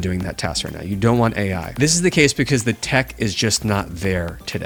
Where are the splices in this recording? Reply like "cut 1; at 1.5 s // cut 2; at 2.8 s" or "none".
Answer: none

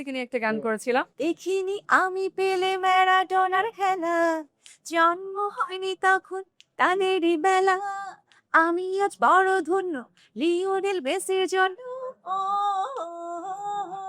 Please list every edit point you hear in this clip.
cut 1; at 1.1 s

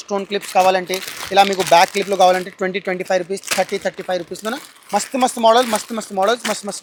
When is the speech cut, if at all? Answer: none

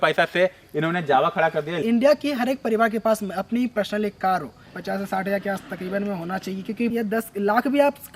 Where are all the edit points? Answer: cut 1; at 1.7 s // cut 2; at 4.6 s // cut 3; at 6.9 s

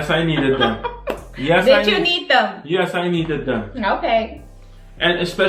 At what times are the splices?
none

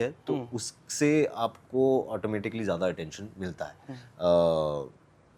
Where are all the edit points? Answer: none

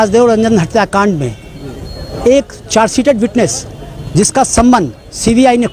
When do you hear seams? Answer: none

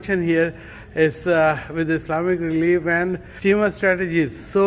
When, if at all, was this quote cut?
cut 1; at 3.3 s

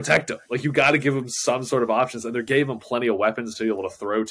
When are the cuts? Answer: none

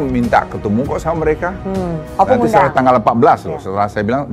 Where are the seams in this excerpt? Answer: cut 1; at 2.0 s

